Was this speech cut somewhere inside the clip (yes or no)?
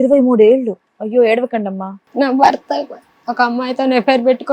yes